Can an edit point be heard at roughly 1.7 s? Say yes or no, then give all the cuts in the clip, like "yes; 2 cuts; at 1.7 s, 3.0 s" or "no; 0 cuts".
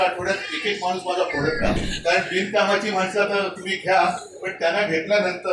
yes; 1 cut; at 1.7 s